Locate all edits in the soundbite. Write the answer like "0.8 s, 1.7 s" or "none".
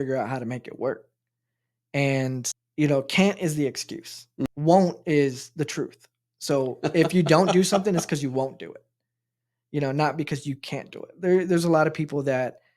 2.6 s, 4.5 s